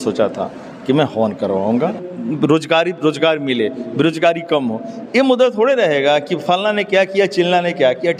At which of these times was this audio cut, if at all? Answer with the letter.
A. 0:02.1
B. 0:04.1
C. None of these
A